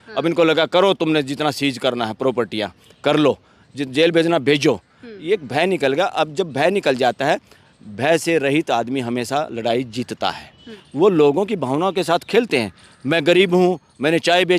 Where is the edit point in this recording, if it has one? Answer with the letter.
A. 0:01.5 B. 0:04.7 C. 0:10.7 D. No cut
C